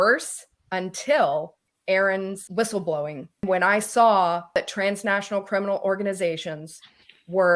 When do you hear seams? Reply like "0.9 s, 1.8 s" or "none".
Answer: 1.6 s, 2.4 s, 3.4 s, 4.5 s

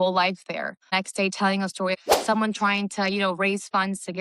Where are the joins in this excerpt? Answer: 0.9 s, 2.0 s

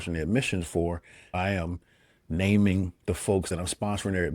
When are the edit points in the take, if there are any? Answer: 1.3 s, 3.5 s

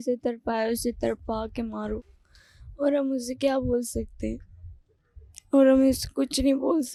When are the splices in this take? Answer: none

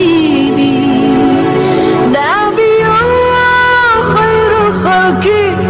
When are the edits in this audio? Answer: none

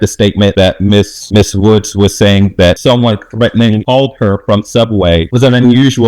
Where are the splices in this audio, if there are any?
2.8 s, 5.3 s

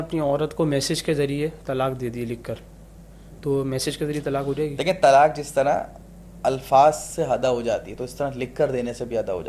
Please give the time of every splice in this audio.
none

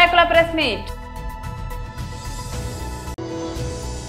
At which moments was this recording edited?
0.8 s, 3.1 s

